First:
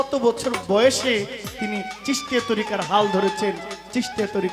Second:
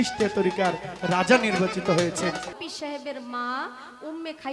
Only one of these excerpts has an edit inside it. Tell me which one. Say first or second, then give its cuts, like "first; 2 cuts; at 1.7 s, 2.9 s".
second; 1 cut; at 2.5 s